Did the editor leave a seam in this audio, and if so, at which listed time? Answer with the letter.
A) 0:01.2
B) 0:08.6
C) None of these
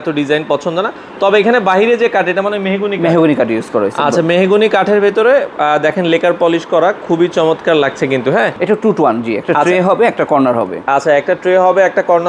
B